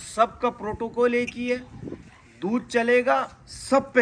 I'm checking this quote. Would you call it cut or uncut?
uncut